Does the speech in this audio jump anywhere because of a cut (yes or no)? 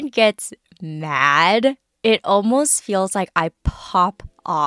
no